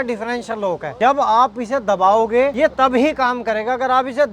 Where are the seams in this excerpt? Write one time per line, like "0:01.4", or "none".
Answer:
0:00.9
0:02.7